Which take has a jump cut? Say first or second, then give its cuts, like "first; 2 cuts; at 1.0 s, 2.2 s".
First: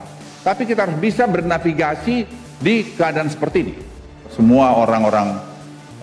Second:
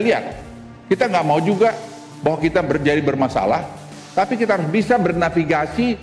first; 1 cut; at 4.3 s